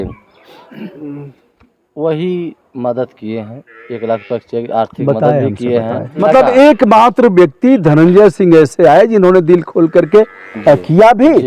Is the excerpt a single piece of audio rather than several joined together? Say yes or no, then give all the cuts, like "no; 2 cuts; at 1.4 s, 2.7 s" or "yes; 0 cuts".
no; 1 cut; at 6.2 s